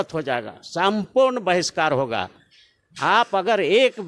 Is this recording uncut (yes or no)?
yes